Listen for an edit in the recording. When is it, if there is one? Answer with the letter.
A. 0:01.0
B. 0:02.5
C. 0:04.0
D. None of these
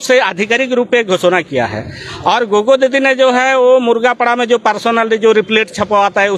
D